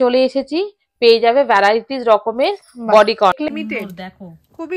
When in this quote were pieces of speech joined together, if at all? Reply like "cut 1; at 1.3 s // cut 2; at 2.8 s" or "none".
cut 1; at 3.5 s